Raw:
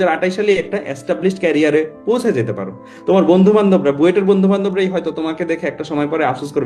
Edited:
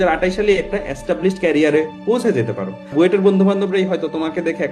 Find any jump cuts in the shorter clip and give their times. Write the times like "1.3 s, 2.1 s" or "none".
2.9 s